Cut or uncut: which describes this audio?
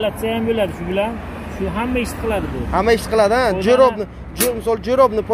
uncut